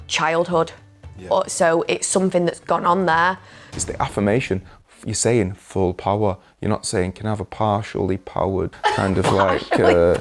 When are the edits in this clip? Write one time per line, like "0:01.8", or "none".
0:03.8
0:08.7